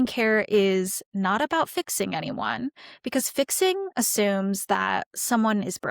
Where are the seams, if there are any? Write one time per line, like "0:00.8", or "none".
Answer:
0:01.1